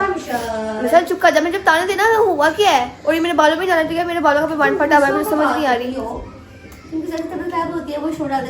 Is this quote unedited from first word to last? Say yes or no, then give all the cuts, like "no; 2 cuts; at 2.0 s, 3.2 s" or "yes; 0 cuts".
yes; 0 cuts